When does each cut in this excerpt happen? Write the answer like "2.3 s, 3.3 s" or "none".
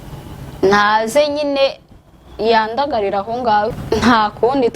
3.8 s